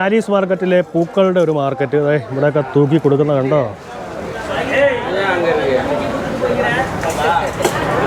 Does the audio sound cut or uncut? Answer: uncut